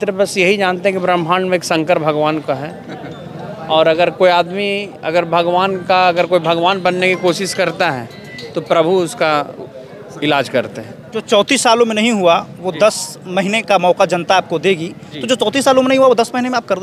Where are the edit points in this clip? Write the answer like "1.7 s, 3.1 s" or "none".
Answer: none